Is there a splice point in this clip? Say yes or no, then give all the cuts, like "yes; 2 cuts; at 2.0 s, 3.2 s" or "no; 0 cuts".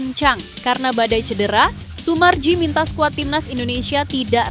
no; 0 cuts